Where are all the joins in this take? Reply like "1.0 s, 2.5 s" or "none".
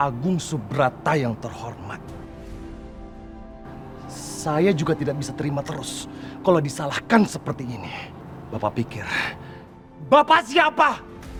none